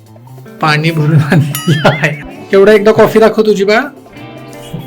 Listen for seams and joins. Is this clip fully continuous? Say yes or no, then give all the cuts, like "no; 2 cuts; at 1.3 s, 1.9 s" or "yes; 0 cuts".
no; 1 cut; at 2.1 s